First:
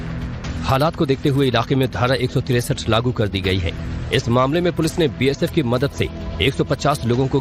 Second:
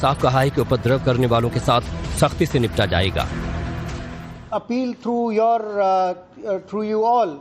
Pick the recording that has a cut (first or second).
second